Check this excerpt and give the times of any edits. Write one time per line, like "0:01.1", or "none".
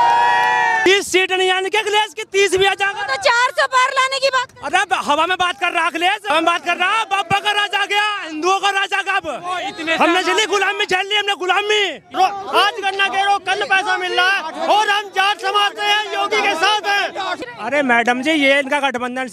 0:00.9
0:12.0
0:17.4